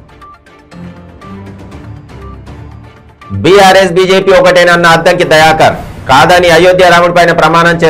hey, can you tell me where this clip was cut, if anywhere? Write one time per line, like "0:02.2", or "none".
0:02.2

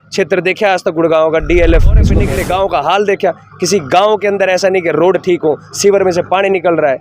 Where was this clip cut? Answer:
0:02.2

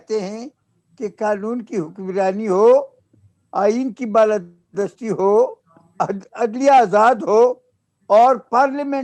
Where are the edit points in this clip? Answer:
none

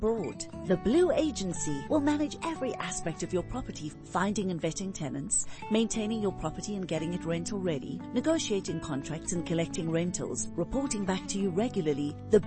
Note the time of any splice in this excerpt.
none

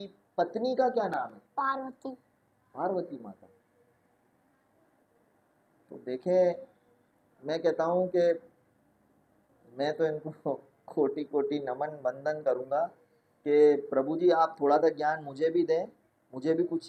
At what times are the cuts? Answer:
none

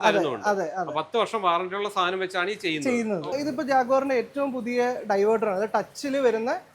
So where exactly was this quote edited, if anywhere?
0:03.3

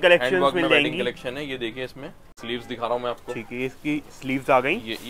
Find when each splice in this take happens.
0:02.4

